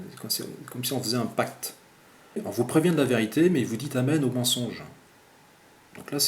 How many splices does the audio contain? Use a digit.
1